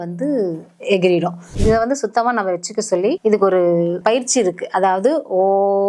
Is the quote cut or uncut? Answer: cut